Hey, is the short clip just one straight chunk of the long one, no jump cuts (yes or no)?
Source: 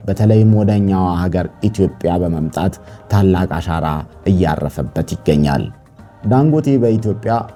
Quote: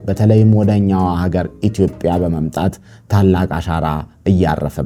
yes